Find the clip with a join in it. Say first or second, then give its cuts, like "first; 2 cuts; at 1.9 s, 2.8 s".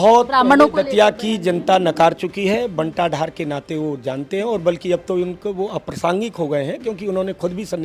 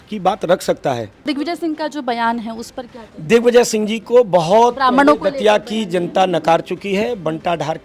second; 1 cut; at 1.2 s